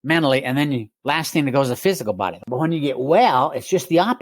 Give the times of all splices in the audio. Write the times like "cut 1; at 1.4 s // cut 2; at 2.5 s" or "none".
cut 1; at 2.4 s